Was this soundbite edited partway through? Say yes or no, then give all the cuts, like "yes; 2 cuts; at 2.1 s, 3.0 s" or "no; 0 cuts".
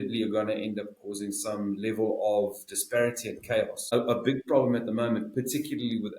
yes; 1 cut; at 3.9 s